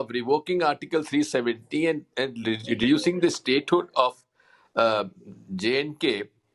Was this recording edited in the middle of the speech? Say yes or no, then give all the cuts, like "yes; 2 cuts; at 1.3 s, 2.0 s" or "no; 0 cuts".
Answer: no; 0 cuts